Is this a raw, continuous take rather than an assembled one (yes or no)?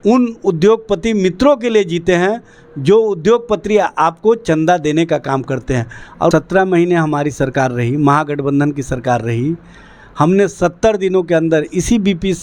no